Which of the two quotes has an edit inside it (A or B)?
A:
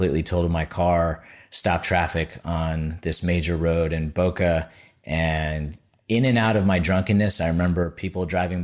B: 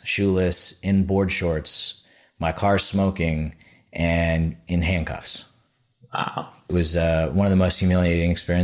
B